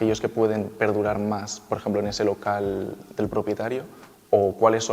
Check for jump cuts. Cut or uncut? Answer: uncut